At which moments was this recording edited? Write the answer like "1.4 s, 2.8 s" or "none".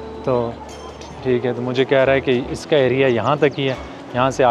none